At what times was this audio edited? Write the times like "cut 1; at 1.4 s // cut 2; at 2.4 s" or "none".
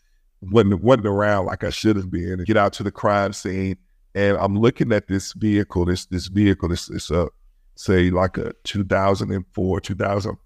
cut 1; at 2.3 s